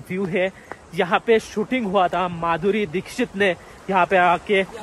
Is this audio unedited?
yes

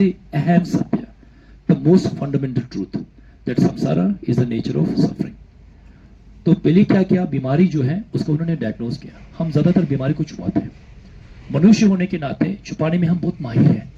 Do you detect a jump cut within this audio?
no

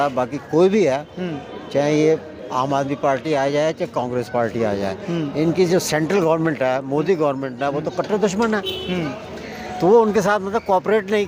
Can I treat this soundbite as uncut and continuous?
yes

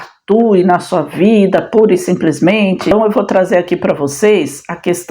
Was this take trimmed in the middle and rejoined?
yes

